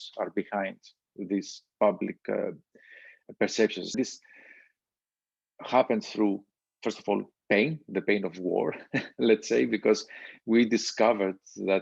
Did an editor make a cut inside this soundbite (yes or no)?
yes